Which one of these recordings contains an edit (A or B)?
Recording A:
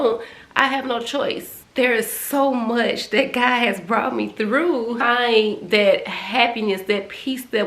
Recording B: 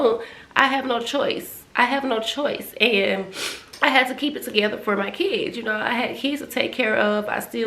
A